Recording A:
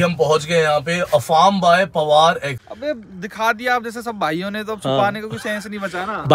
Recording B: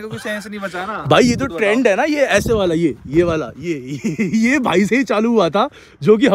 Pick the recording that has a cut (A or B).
A